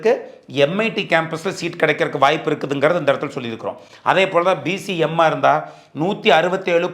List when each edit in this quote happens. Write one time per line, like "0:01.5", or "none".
none